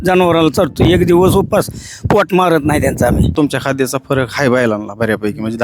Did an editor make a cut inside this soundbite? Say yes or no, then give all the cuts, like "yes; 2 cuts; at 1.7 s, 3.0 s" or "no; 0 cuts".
yes; 1 cut; at 3.3 s